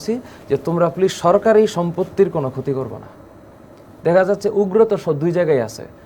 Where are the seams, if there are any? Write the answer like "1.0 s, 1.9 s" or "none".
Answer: none